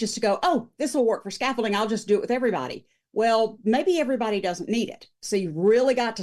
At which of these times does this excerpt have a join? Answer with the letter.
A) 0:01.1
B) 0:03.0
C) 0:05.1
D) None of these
D